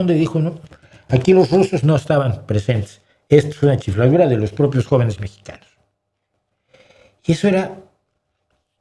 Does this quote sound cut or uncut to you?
uncut